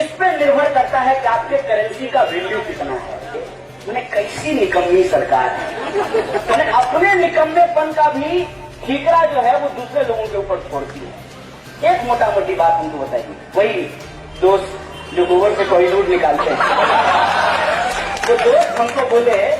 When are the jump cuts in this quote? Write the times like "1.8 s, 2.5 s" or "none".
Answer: 3.4 s